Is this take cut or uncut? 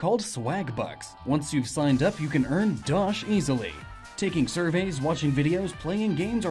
cut